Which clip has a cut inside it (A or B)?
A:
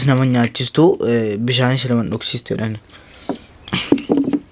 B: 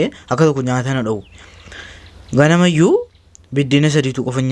A